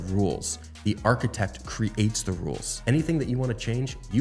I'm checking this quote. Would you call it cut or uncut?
cut